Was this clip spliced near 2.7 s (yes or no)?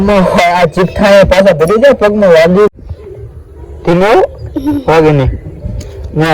yes